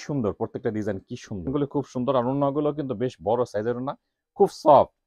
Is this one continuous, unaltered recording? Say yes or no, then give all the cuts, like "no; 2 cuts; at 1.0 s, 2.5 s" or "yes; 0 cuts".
no; 1 cut; at 1.5 s